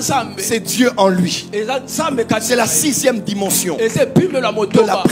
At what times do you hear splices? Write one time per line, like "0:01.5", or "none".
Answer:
none